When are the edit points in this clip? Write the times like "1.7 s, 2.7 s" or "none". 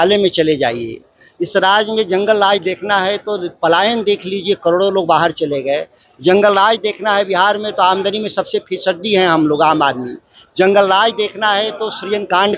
none